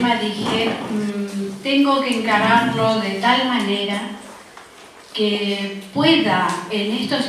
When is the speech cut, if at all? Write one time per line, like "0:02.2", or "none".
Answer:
0:02.0